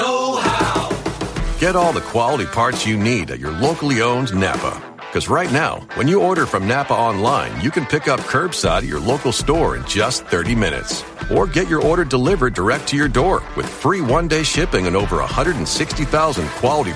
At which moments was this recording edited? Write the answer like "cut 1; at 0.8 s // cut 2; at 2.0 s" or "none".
cut 1; at 1.2 s